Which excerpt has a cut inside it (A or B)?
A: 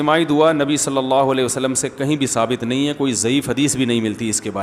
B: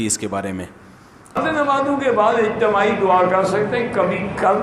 B